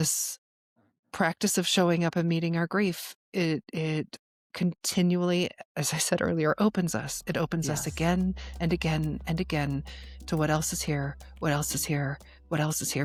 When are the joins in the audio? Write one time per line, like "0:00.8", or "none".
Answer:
none